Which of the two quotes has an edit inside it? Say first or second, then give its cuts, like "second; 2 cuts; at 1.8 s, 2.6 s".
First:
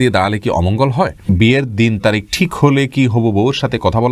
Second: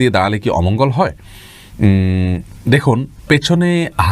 first; 1 cut; at 1.3 s